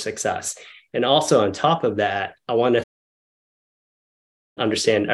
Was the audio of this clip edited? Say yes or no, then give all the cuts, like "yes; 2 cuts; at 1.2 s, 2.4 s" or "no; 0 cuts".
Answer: no; 0 cuts